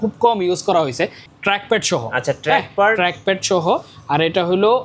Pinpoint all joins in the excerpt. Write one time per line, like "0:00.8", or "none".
0:01.2